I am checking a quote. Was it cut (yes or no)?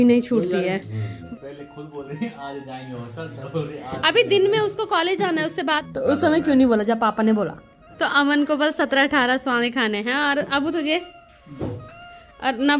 yes